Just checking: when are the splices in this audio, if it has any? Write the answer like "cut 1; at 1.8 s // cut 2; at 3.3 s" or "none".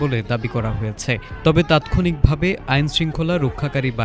none